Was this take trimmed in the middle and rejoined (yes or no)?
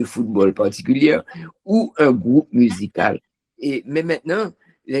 yes